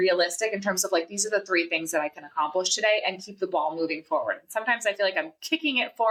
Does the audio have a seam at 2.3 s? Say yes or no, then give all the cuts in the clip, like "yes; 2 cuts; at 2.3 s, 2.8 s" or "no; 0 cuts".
no; 0 cuts